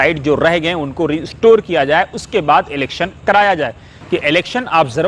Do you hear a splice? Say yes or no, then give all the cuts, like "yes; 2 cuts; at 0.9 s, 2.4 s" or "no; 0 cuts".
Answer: yes; 1 cut; at 3.9 s